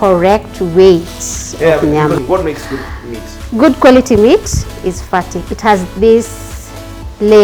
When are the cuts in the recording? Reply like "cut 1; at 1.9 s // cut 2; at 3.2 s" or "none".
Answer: cut 1; at 2.2 s